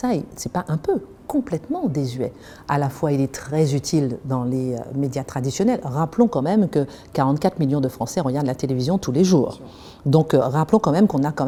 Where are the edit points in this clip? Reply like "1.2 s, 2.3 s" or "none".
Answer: none